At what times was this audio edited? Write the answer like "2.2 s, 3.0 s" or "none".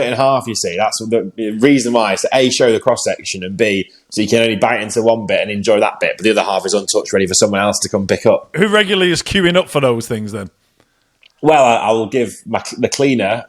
8.5 s